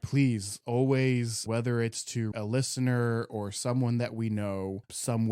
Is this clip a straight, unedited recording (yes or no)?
no